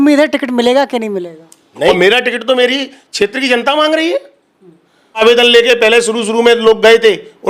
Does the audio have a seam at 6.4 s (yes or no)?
no